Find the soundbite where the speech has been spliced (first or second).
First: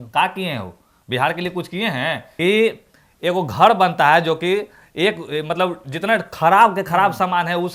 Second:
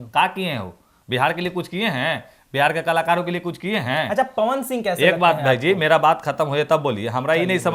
first